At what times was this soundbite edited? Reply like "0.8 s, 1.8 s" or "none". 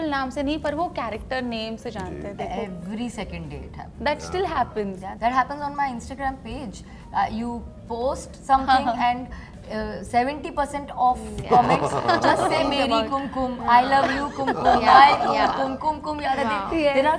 none